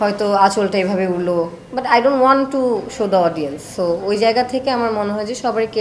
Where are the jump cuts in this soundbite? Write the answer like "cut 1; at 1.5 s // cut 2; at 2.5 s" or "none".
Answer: none